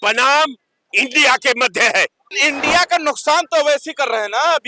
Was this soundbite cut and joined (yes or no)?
yes